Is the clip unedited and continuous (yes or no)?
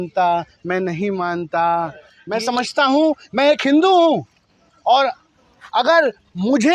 no